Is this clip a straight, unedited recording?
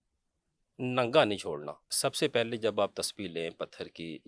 no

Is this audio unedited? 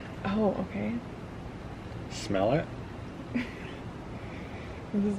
yes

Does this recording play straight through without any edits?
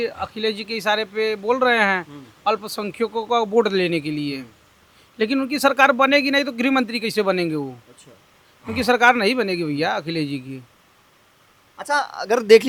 yes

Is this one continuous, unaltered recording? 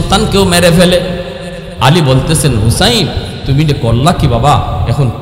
no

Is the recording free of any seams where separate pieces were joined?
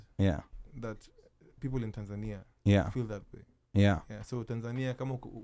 yes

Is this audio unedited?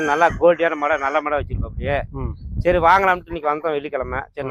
yes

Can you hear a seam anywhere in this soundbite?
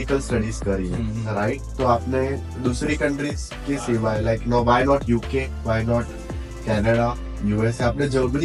no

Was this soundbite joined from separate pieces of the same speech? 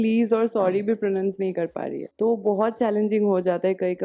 no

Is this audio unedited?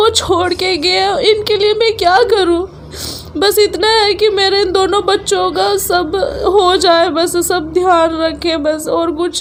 yes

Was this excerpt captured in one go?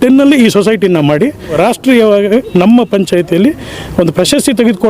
no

